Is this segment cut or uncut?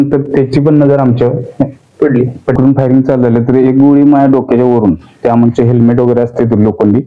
cut